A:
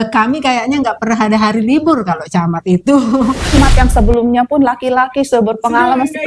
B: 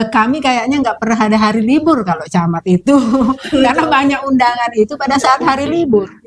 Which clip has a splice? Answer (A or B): A